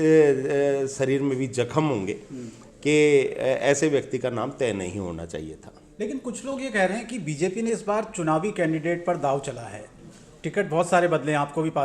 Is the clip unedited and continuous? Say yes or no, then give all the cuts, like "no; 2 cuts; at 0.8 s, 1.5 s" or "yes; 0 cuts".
yes; 0 cuts